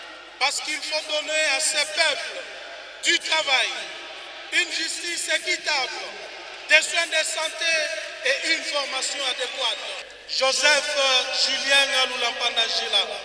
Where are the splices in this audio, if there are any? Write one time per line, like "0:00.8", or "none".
0:10.1

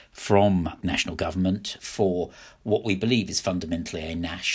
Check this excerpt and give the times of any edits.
0:00.8
0:01.8

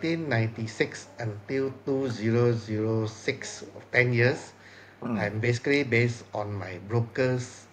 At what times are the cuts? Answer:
none

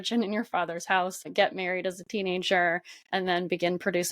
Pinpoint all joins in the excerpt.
0:01.2

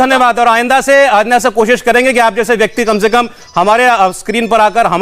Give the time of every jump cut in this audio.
none

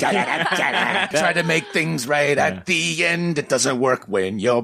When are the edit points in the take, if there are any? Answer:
0:01.1

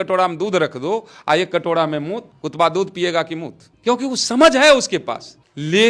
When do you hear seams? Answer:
none

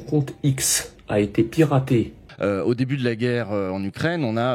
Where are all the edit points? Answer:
0:02.2

